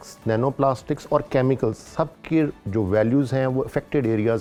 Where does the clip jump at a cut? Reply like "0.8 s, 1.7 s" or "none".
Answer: none

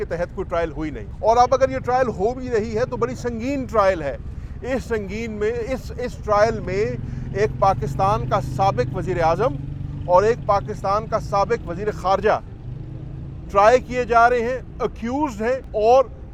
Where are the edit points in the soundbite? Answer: none

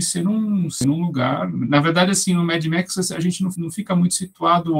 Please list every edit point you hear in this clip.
none

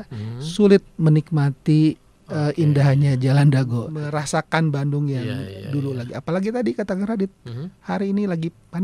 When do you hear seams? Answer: 3.9 s

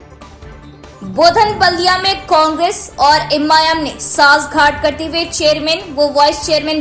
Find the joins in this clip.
1.0 s

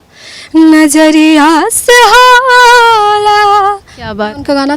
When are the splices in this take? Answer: none

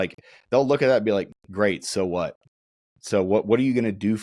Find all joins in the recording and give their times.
none

